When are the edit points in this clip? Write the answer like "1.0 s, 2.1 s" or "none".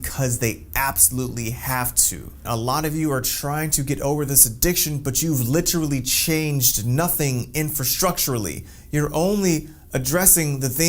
2.3 s